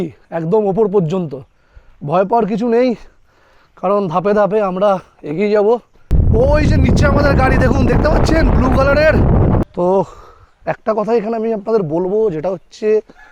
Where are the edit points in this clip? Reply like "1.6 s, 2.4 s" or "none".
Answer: 6.1 s, 9.6 s

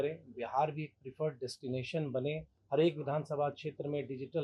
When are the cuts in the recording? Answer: 2.5 s

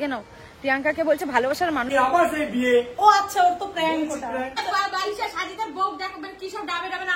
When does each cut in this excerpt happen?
1.9 s, 4.6 s

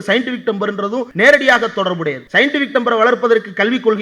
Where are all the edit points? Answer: 1.1 s, 2.2 s

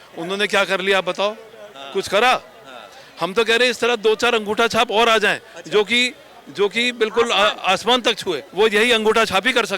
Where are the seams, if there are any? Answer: 8.5 s

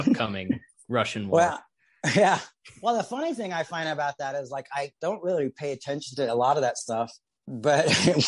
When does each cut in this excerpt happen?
7.4 s

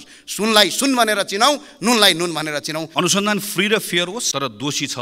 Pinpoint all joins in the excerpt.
2.9 s, 4.3 s

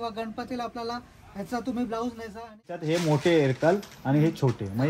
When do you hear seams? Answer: 2.8 s

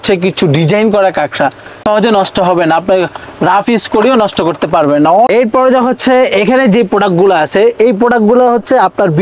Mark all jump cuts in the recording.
none

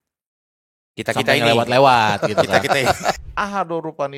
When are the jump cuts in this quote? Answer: 3.2 s

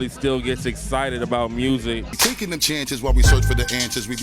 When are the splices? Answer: 2.1 s

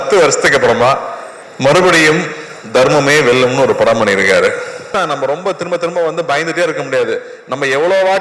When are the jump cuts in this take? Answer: 4.9 s

